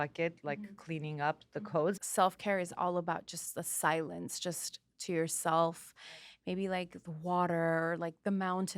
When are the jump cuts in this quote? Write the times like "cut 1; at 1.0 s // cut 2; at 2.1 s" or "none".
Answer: cut 1; at 2.0 s